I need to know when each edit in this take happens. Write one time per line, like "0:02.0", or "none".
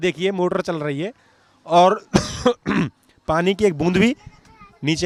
none